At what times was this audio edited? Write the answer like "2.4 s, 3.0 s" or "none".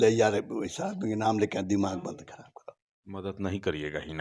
3.1 s